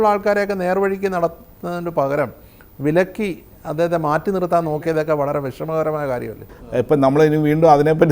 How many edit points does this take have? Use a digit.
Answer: 1